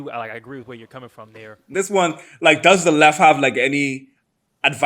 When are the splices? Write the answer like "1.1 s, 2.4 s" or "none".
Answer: 1.6 s